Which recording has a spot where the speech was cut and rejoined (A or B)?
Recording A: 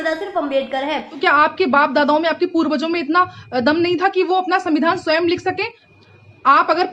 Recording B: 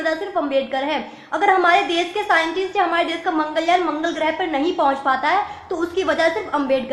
A